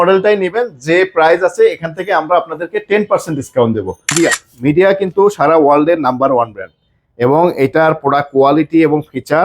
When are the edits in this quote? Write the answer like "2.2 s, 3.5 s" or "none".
4.2 s